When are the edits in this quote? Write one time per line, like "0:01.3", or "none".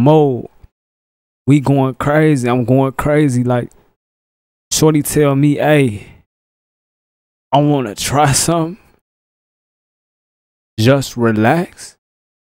none